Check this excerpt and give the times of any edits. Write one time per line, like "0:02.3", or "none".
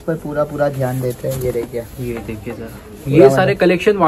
none